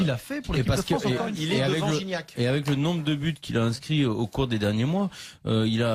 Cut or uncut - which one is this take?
uncut